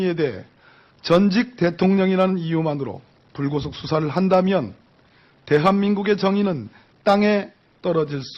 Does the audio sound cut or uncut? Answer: uncut